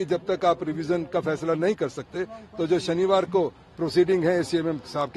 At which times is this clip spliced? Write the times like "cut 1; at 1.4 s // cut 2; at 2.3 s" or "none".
none

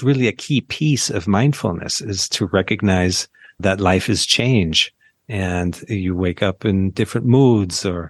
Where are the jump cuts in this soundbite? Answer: none

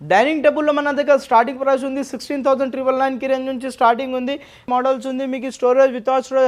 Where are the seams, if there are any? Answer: cut 1; at 4.7 s

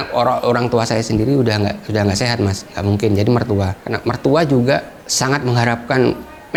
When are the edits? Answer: none

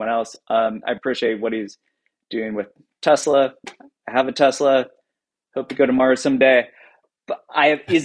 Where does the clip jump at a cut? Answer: none

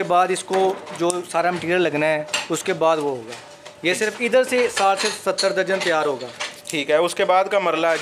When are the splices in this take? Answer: none

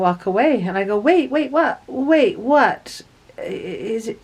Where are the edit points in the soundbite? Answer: none

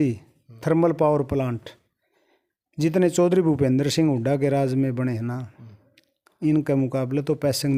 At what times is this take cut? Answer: none

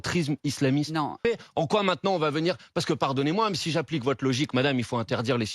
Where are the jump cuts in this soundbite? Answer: cut 1; at 1.2 s

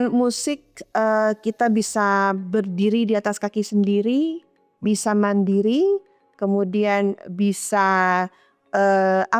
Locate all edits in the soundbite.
none

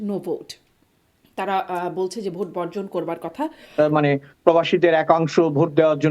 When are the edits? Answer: cut 1; at 3.7 s

